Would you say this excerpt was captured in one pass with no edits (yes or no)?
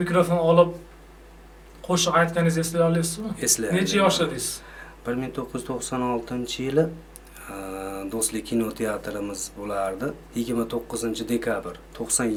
yes